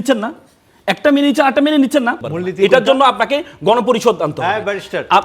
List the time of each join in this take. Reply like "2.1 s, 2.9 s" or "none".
2.3 s